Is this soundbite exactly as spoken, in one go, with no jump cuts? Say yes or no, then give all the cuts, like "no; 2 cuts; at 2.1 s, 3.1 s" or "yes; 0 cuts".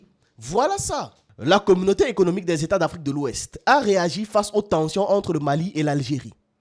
no; 1 cut; at 1.3 s